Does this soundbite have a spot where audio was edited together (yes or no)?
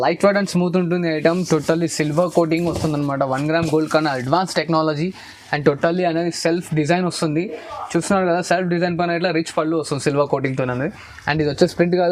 no